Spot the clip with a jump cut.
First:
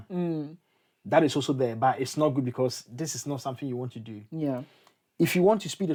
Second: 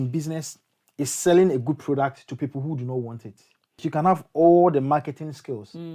second; 1 cut; at 3.9 s

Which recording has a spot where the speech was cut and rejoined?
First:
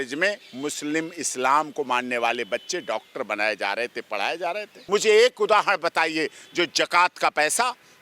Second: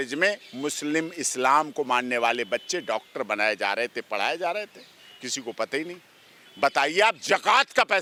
first; 1 cut; at 4.8 s

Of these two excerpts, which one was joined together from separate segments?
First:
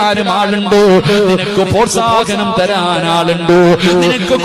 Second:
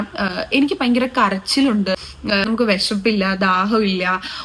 second; 1 cut; at 2.0 s

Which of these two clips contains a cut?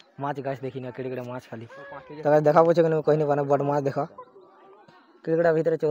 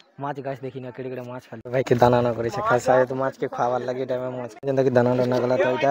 second; 2 cuts; at 1.5 s, 4.5 s

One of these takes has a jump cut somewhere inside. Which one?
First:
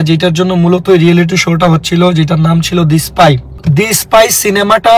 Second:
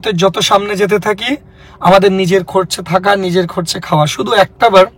first; 1 cut; at 3.6 s

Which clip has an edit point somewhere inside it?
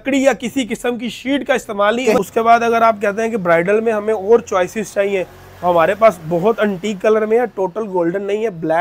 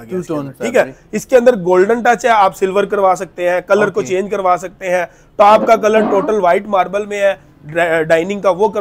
first; 1 cut; at 2.2 s

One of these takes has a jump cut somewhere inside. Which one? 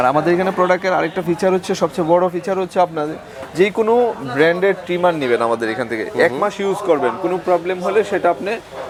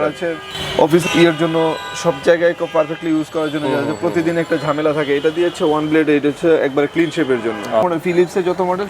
second; 2 cuts; at 1.0 s, 7.8 s

